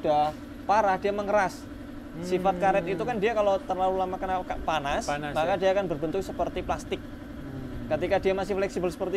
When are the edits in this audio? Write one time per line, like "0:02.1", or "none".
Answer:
none